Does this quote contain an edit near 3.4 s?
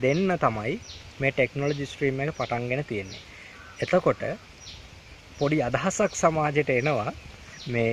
no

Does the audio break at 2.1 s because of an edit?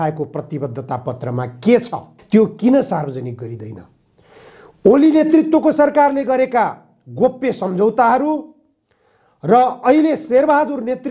yes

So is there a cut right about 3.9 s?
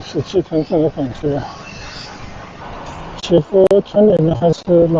no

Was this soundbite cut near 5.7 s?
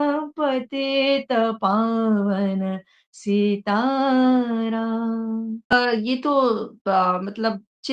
yes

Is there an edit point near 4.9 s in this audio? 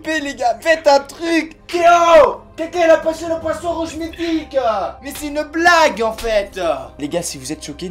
no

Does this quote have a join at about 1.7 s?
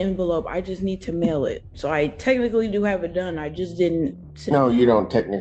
yes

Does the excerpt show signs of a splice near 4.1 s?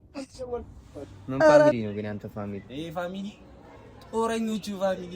no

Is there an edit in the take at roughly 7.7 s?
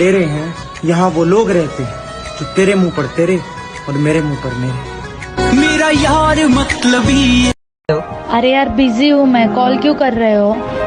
yes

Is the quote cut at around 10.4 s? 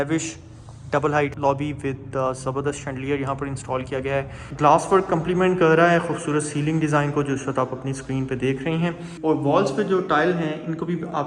no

